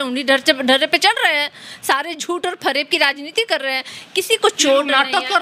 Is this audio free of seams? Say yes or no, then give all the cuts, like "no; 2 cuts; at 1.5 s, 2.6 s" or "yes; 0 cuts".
yes; 0 cuts